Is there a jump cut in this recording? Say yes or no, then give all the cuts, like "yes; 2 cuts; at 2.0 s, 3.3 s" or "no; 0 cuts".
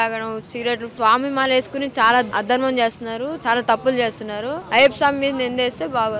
yes; 2 cuts; at 0.9 s, 4.6 s